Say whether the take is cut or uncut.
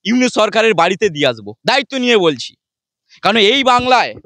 uncut